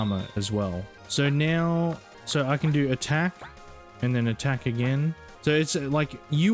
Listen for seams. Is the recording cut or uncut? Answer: cut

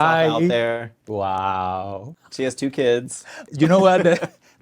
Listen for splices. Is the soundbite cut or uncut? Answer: cut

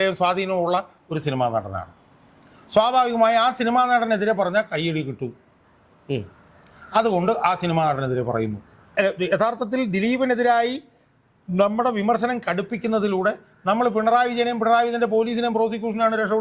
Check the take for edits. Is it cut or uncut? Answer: cut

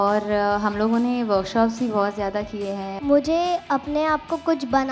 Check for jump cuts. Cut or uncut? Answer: cut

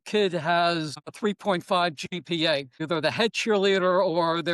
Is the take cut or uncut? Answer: cut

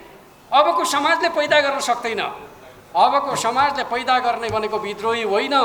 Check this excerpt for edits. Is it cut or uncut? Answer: uncut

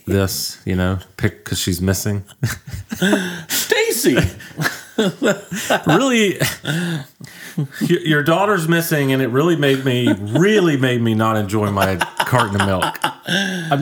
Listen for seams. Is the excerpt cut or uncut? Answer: uncut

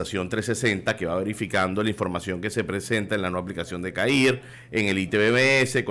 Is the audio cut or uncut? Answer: cut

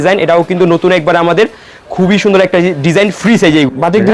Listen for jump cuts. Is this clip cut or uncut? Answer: uncut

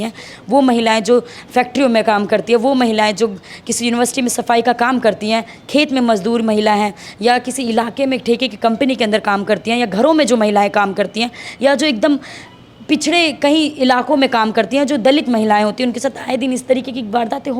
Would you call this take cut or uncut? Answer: uncut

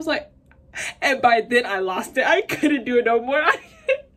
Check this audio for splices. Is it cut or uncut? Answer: uncut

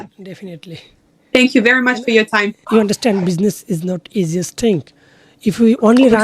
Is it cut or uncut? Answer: cut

